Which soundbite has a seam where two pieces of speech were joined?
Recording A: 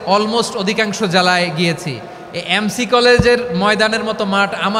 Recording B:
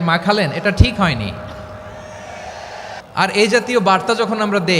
B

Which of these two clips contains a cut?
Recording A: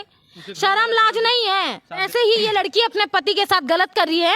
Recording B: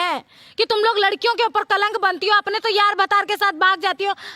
A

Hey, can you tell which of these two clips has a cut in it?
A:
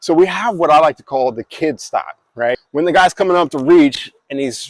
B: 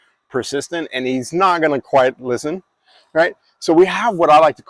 A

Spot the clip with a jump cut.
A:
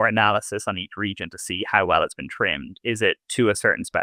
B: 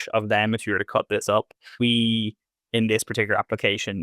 B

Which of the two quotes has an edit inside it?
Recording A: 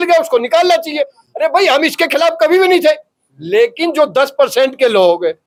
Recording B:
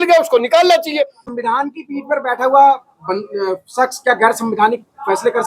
B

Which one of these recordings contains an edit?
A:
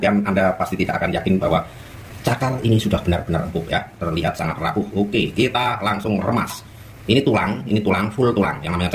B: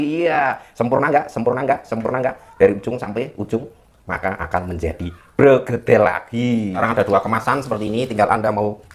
B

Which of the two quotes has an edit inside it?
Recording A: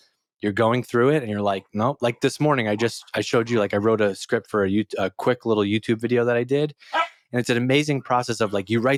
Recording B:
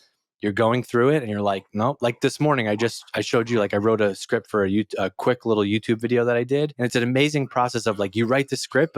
B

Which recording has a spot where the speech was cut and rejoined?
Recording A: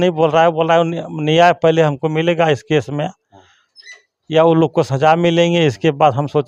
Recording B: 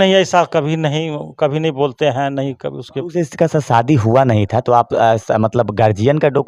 B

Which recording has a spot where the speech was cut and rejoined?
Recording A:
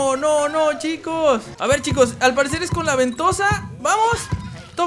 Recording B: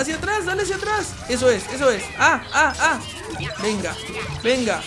A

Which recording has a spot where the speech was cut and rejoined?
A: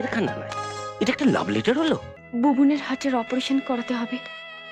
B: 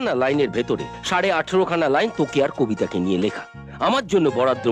A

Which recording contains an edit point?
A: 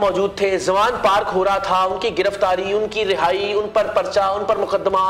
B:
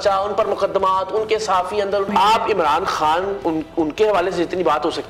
B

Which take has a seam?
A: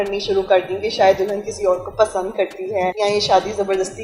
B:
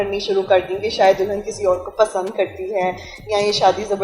A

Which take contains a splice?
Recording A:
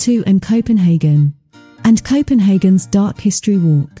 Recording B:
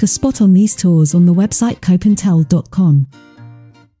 B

